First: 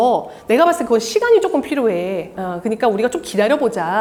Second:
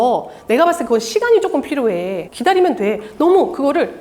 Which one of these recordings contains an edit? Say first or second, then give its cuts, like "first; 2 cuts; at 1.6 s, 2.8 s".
second; 1 cut; at 2.2 s